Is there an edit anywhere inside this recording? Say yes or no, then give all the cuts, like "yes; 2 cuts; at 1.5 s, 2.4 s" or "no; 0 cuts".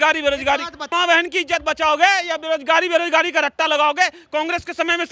yes; 1 cut; at 0.9 s